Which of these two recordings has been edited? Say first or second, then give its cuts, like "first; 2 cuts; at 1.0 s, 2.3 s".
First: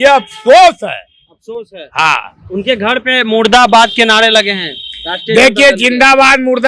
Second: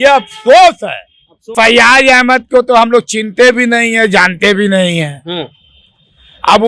second; 1 cut; at 1.5 s